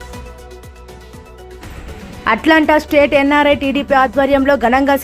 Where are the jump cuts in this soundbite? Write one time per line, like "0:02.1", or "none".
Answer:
0:01.6